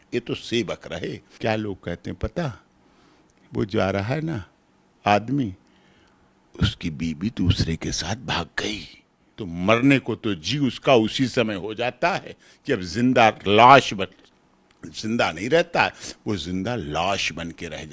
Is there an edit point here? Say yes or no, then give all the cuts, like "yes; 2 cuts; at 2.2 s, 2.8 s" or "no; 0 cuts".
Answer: yes; 2 cuts; at 1.3 s, 9.3 s